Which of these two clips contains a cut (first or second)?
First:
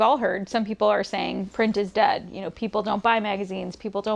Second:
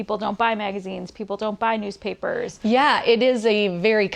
second